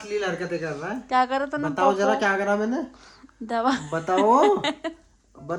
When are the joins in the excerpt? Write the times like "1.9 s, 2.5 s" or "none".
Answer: none